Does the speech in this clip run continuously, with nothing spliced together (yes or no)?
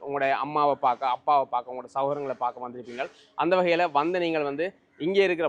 yes